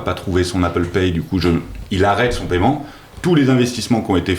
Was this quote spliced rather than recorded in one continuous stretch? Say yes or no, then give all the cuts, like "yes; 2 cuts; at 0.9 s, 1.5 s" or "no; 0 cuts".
no; 0 cuts